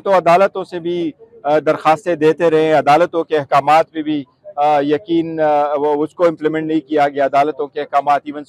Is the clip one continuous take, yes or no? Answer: yes